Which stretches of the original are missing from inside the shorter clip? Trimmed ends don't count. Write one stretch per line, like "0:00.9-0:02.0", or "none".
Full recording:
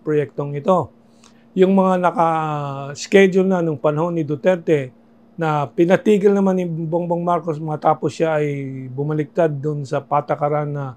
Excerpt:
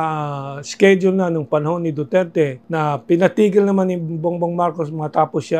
0:04.9-0:05.3